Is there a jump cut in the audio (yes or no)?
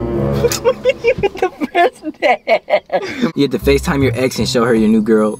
yes